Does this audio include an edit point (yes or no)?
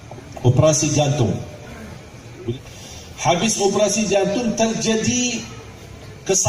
yes